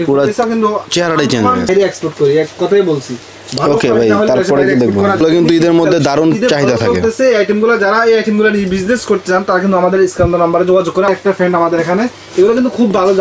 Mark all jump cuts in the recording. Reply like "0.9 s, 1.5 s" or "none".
1.7 s, 5.2 s, 11.1 s